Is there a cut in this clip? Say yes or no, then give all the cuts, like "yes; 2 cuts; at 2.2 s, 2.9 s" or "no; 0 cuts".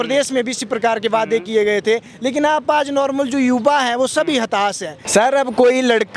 yes; 1 cut; at 4.9 s